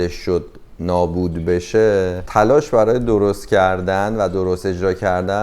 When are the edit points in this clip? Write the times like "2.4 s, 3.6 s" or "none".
2.2 s